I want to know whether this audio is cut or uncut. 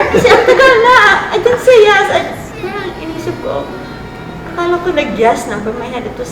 uncut